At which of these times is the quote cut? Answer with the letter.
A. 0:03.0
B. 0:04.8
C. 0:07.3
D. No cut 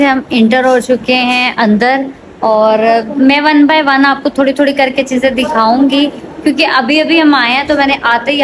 D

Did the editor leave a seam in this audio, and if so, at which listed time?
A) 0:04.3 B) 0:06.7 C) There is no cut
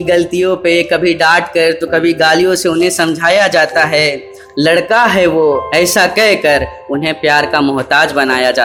C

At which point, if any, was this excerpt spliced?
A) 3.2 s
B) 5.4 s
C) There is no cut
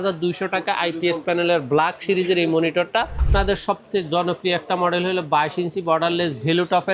A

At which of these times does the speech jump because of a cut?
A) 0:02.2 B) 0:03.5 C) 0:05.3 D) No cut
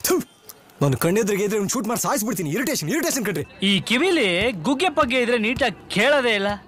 B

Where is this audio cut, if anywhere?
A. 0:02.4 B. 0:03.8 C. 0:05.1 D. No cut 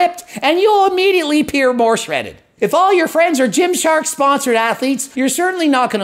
C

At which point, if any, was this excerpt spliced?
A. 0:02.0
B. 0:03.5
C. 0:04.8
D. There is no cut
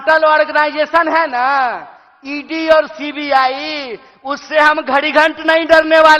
D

